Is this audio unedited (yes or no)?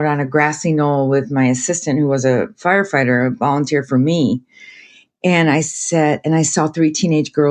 yes